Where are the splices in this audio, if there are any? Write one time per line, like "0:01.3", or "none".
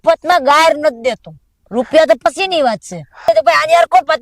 0:03.2